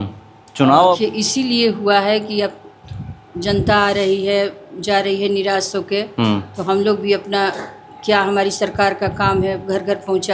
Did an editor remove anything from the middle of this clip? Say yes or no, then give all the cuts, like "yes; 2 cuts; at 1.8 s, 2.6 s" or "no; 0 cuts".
yes; 1 cut; at 1.0 s